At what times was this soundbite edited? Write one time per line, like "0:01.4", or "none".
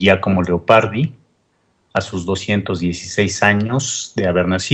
0:03.2